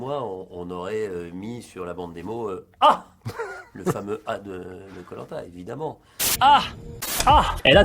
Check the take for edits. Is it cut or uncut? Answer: uncut